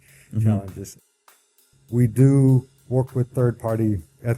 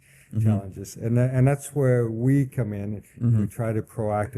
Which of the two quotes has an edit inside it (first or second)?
first